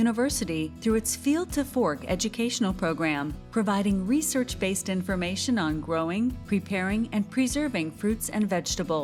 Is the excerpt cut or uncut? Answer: uncut